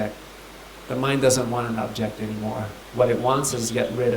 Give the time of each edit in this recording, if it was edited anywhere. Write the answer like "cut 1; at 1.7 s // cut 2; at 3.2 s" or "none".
cut 1; at 2.8 s